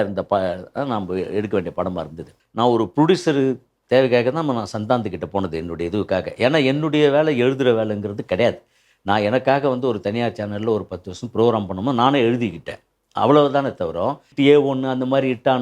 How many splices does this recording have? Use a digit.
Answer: 2